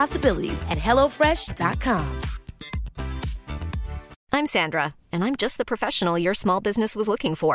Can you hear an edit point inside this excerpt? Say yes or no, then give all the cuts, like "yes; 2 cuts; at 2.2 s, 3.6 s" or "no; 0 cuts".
yes; 1 cut; at 4.1 s